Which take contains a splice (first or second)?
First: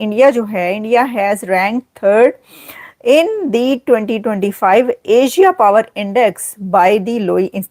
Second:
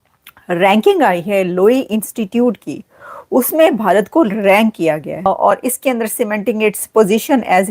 second